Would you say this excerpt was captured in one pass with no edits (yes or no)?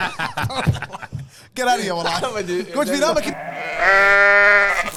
yes